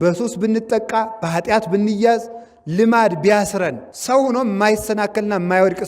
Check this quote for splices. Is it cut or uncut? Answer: cut